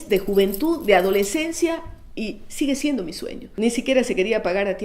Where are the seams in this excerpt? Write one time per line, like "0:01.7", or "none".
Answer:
0:03.4